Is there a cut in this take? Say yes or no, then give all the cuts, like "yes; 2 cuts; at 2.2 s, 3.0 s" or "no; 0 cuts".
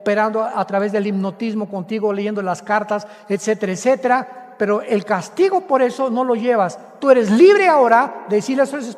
yes; 1 cut; at 6.9 s